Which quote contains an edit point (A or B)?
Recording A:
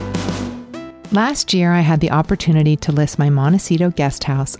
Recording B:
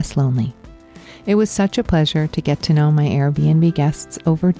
A